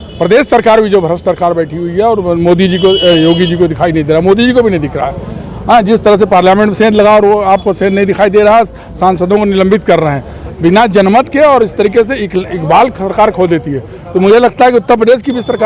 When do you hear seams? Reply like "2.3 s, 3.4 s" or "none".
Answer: none